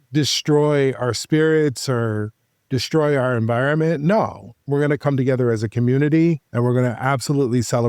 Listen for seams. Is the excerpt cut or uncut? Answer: cut